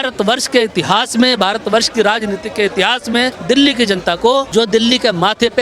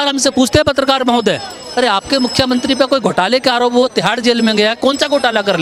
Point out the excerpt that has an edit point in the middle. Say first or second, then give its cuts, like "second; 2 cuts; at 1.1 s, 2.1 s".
first; 2 cuts; at 3.4 s, 4.5 s